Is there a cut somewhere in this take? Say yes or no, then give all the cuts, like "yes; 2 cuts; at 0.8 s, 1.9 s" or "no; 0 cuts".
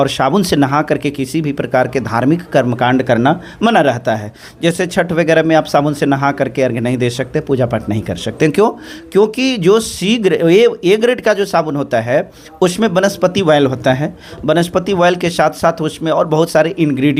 no; 0 cuts